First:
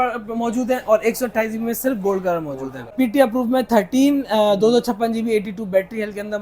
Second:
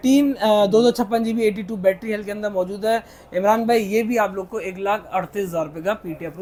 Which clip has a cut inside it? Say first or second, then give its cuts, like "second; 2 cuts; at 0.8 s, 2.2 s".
first; 1 cut; at 2.9 s